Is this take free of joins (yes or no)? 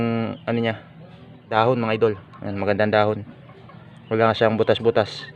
no